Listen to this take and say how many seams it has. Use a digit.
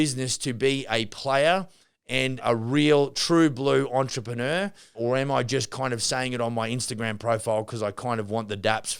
2